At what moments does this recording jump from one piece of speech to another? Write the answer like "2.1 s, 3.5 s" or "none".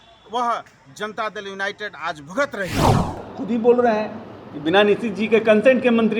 2.7 s, 3.3 s